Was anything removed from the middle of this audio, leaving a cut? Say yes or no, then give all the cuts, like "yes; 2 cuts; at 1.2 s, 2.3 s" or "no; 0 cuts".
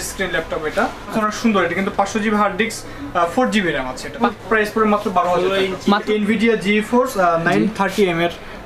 yes; 3 cuts; at 1.1 s, 4.3 s, 6.0 s